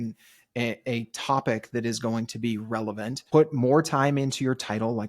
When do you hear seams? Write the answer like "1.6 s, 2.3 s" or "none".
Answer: 3.2 s